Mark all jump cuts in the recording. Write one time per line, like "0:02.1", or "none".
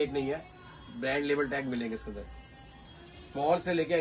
none